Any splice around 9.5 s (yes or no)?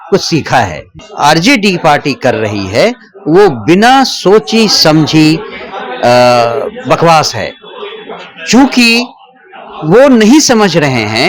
no